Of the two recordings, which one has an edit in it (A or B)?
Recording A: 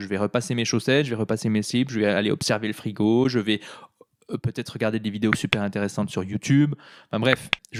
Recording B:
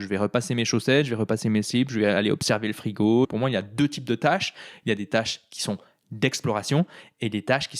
B